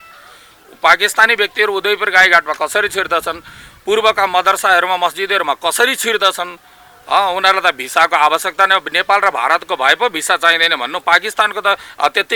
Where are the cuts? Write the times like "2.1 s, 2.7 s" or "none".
none